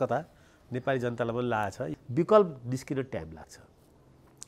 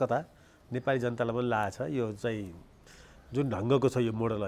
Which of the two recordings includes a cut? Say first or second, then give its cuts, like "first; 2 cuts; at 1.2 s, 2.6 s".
first; 1 cut; at 1.9 s